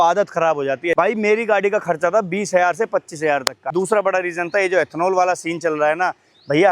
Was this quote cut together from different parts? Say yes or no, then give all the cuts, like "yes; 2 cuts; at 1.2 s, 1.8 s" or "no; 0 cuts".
yes; 2 cuts; at 0.9 s, 3.7 s